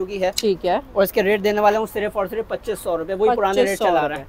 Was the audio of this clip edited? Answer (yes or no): no